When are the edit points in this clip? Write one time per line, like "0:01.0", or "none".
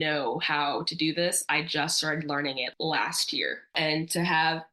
0:02.7
0:03.7

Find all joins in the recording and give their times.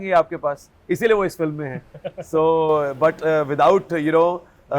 none

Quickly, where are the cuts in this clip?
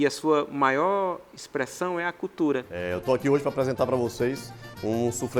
0:02.7

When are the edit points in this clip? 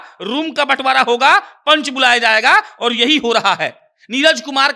none

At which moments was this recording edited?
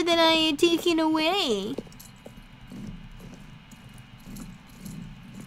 none

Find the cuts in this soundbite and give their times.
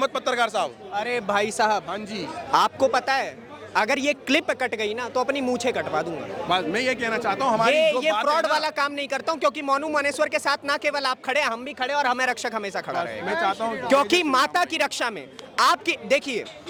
none

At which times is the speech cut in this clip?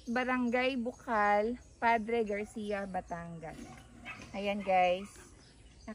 none

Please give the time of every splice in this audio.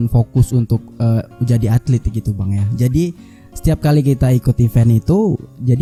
none

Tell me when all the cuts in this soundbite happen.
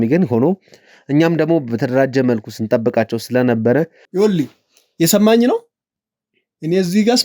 0:04.0

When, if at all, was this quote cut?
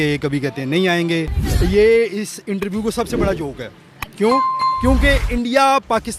0:01.3
0:03.7

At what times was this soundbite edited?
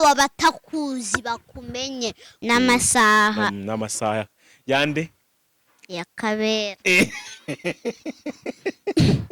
0:02.3

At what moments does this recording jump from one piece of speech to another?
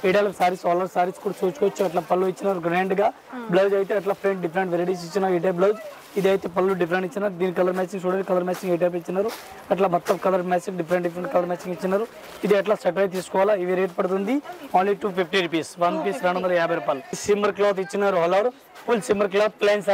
none

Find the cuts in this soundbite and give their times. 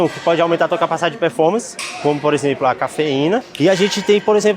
0:03.5

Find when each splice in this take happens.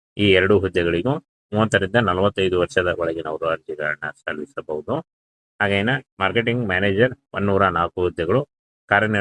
none

